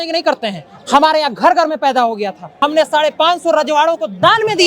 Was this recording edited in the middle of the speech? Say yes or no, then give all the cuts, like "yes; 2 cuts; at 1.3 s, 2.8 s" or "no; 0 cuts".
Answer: yes; 1 cut; at 2.4 s